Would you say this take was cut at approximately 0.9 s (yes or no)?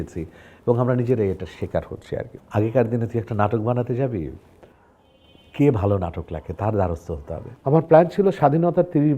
no